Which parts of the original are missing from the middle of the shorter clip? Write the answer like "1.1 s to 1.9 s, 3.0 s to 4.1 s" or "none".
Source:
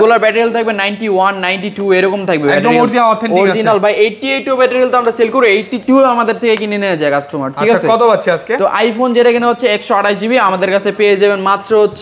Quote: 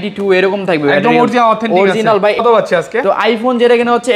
4.0 s to 7.9 s